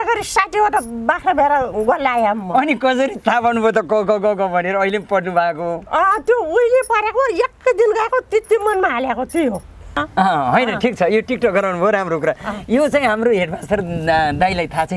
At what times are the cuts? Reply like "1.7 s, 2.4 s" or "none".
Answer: 10.0 s